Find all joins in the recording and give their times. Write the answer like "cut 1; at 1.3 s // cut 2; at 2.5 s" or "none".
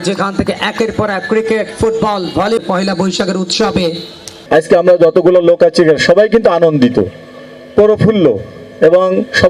cut 1; at 4.4 s